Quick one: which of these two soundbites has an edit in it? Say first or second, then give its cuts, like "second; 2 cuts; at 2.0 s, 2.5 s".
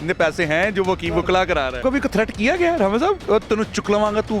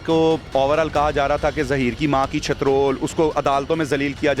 first; 1 cut; at 1.8 s